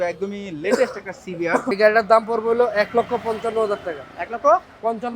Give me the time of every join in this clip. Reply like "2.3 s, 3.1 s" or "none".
1.7 s